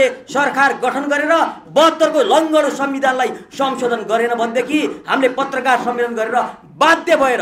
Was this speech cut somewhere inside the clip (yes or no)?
no